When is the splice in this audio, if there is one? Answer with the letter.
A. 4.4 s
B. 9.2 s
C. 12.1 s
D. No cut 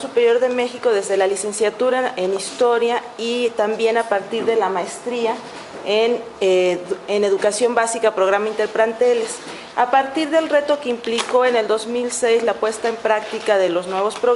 A